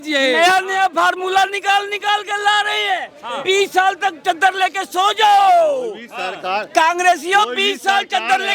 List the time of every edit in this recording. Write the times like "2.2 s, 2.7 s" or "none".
none